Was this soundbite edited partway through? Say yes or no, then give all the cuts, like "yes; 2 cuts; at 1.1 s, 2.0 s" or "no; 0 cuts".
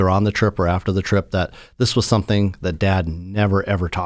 no; 0 cuts